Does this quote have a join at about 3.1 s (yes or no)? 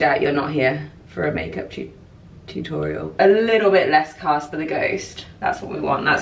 yes